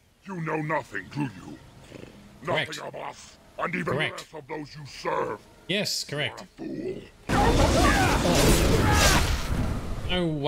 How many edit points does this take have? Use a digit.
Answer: 1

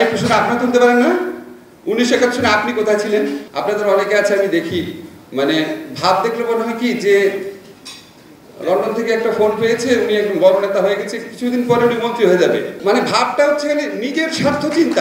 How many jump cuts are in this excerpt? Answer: 2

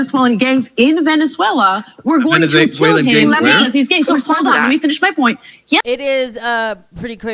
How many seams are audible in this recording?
1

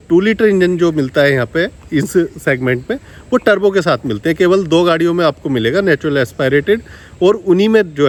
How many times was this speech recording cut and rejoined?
0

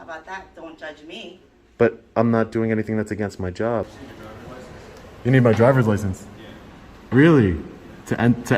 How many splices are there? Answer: 1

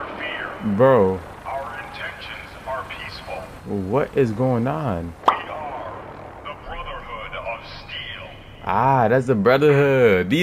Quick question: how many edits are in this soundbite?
2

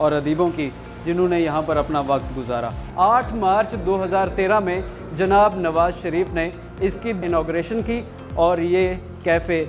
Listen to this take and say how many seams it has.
2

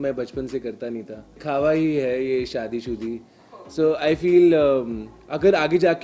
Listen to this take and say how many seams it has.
1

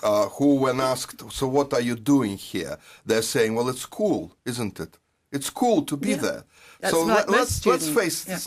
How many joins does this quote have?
1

